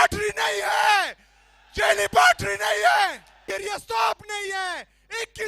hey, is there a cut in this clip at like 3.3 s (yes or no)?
yes